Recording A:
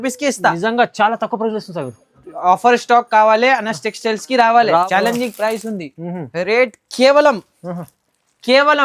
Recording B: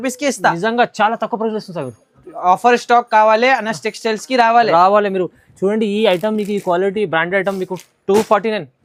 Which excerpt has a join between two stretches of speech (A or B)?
A